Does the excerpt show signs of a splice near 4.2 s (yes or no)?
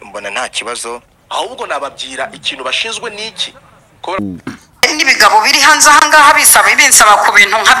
yes